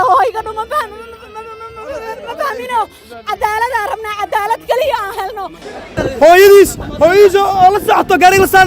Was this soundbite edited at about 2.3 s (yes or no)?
no